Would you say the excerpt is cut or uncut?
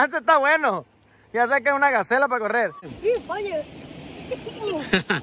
cut